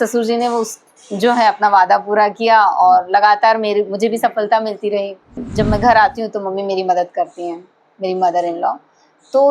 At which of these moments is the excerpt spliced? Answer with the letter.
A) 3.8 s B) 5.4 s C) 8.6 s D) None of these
B